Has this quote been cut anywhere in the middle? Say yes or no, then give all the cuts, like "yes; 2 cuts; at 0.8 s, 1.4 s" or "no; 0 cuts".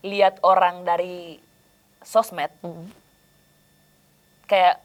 no; 0 cuts